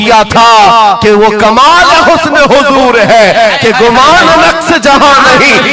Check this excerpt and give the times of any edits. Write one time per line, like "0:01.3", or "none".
none